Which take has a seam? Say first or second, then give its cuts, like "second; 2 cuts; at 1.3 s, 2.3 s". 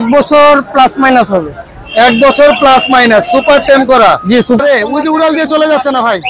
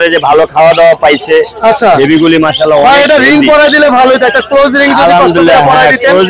first; 1 cut; at 4.6 s